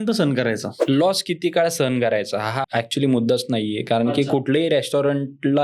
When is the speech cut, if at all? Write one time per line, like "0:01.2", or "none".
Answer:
0:02.6